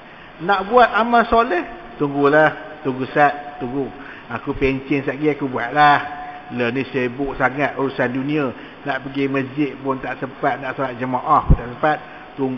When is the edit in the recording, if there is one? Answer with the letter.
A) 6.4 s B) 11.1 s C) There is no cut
C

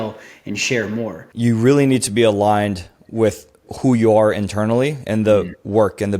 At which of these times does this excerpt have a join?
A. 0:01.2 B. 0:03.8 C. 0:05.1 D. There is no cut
A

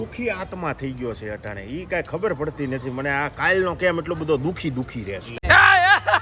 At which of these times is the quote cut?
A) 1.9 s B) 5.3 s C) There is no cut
B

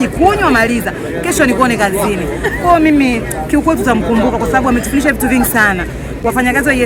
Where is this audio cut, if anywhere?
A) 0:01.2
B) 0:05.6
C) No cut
C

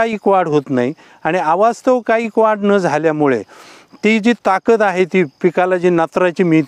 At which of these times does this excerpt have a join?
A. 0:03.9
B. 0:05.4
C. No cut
C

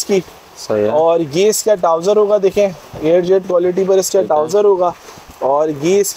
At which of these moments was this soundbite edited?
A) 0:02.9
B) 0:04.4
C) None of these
C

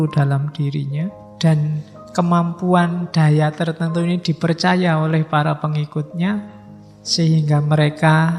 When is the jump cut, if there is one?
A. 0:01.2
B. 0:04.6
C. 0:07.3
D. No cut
A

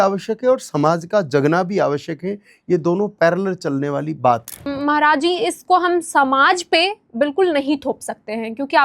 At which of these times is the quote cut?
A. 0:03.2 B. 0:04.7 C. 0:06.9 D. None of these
B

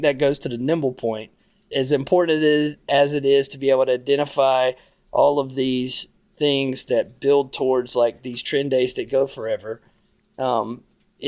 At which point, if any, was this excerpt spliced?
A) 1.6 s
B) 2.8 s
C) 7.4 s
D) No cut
A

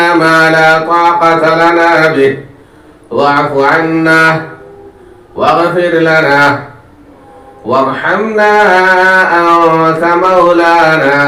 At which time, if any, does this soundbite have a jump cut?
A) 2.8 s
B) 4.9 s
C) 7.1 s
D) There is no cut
D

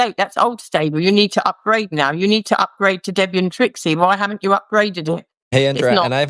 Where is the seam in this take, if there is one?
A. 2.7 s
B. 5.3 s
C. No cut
B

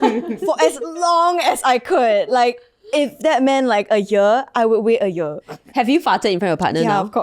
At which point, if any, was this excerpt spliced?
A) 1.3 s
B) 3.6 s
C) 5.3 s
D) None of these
D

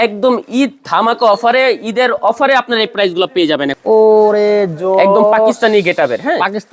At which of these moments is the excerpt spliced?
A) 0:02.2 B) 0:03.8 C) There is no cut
B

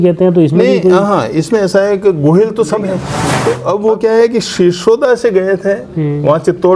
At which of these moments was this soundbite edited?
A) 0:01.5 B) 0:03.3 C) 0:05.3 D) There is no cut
B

